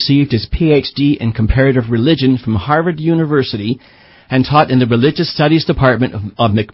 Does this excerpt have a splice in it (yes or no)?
no